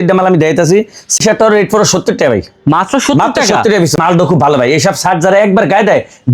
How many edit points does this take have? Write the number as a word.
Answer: two